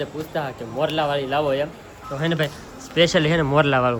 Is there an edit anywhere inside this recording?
no; 0 cuts

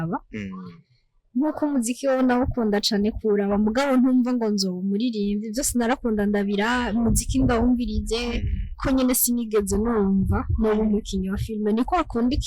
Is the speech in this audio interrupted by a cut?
yes; 1 cut; at 8.8 s

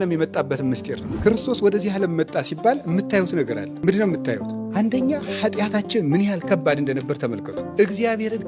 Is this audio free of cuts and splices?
no; 4 cuts; at 1.0 s, 3.7 s, 4.5 s, 7.7 s

